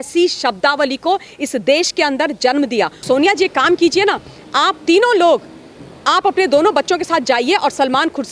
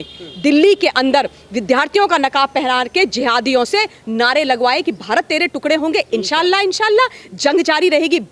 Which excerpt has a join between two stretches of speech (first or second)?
first